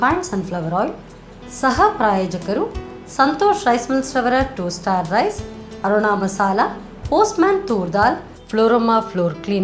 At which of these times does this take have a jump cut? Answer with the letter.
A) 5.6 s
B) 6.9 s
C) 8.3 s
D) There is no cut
D